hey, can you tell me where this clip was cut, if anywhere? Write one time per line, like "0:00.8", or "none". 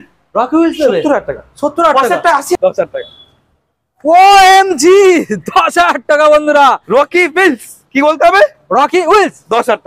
0:02.6